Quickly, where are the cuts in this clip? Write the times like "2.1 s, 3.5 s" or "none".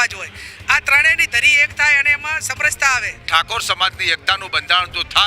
3.2 s